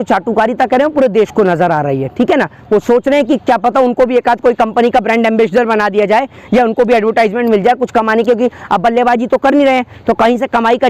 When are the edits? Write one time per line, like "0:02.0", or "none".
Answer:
none